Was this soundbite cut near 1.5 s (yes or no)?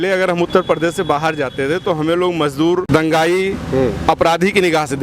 no